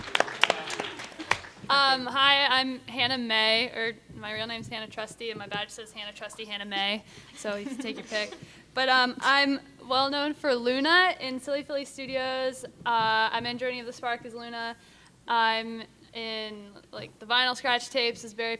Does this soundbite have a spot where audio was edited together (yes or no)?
yes